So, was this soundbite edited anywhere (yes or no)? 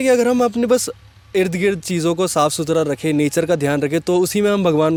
no